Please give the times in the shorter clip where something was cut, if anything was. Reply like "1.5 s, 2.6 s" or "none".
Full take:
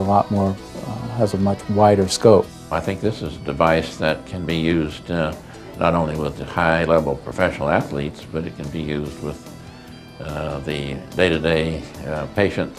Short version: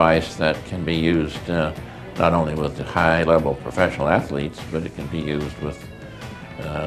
none